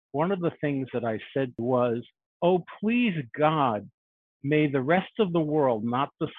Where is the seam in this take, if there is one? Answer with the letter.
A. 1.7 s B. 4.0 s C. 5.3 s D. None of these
A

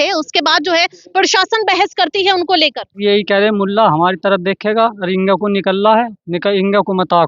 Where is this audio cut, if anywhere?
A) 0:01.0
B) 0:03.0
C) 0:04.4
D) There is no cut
B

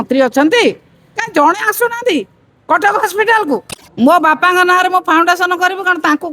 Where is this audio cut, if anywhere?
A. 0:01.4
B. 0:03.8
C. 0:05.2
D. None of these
B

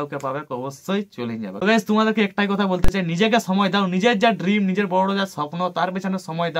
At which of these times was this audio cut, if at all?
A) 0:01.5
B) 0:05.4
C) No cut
A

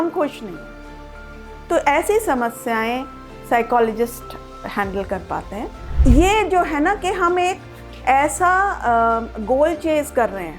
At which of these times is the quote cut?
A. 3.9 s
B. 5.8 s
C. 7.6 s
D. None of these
B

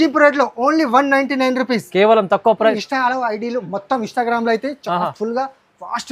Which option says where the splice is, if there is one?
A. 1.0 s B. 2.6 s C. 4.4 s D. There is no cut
B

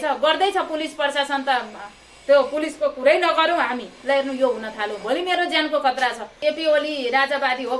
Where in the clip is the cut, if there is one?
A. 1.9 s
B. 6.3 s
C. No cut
B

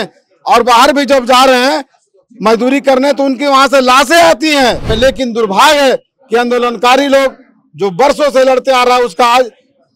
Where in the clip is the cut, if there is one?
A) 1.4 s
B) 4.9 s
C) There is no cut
B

